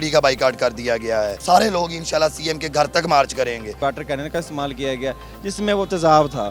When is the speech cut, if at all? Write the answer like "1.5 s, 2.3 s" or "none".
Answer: 1.4 s, 3.8 s